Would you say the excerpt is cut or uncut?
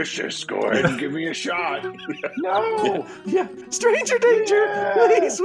cut